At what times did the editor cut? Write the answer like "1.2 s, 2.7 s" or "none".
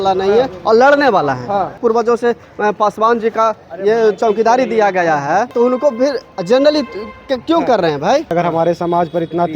1.8 s, 5.5 s, 8.3 s